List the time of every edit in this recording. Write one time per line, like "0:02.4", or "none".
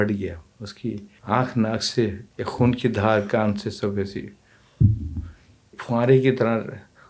0:01.1
0:02.3
0:05.8